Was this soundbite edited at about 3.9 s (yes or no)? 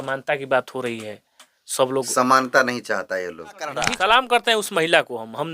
yes